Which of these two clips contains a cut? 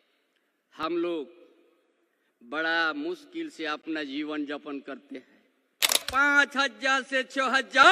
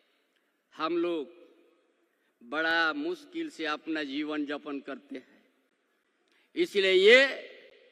first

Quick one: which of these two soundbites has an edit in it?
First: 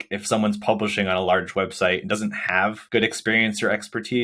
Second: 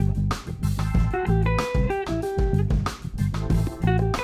first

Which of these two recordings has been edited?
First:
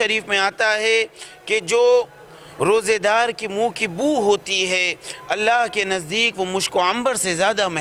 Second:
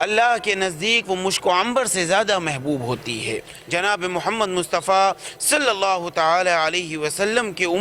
second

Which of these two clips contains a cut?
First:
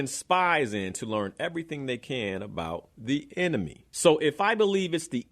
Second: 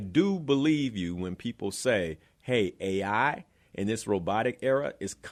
first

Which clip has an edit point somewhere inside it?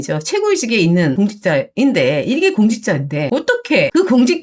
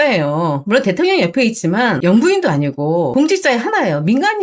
first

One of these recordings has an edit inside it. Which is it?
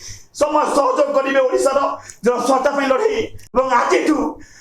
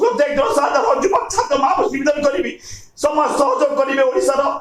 first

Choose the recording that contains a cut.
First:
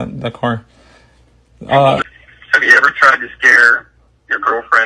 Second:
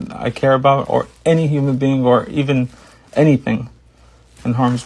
first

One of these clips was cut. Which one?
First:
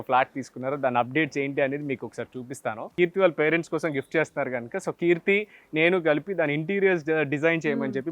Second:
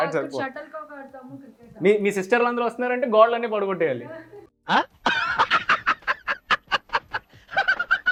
first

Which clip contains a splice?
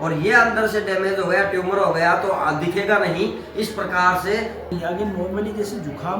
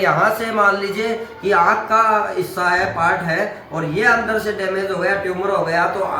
first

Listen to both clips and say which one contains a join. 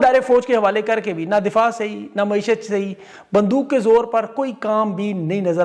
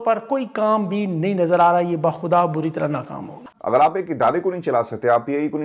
second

